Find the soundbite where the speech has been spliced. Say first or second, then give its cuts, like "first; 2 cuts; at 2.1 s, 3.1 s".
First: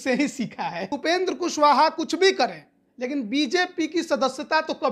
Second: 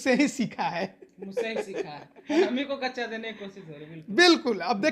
first; 1 cut; at 0.9 s